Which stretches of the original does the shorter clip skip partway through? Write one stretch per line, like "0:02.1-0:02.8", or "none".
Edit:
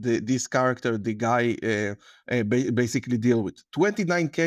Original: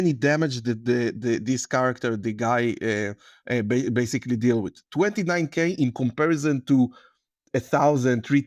none